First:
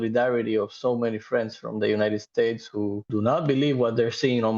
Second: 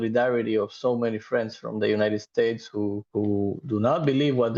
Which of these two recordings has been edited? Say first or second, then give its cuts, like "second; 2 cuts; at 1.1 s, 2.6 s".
first; 1 cut; at 3.0 s